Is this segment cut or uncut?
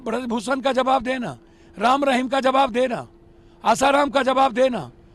uncut